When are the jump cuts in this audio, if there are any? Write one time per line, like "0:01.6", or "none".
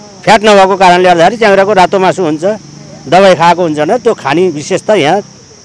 none

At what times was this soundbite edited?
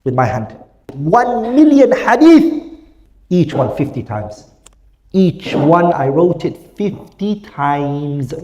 0:00.9

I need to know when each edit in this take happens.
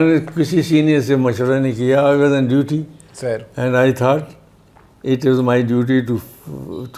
none

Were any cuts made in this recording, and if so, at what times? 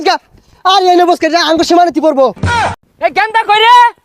0:02.7

